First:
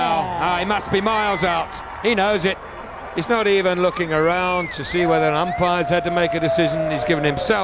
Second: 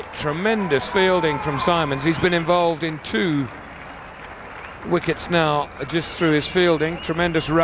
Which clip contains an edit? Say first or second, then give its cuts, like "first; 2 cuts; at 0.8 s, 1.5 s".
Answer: first; 1 cut; at 2.2 s